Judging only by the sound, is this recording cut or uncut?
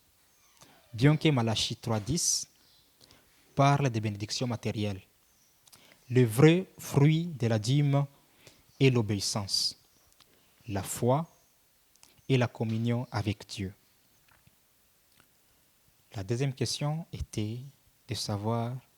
cut